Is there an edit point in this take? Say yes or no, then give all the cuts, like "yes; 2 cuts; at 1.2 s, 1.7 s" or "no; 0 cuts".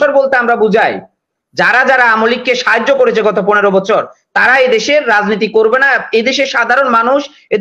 no; 0 cuts